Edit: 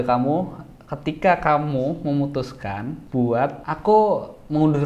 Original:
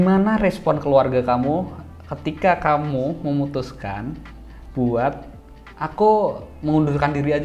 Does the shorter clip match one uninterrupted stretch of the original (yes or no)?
no